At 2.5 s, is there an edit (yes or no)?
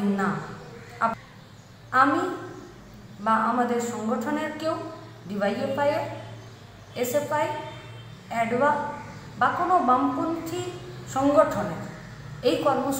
no